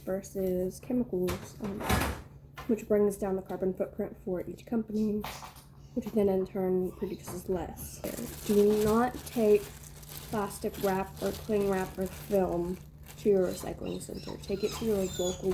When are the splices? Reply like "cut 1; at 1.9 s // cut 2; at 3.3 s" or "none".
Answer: cut 1; at 8.1 s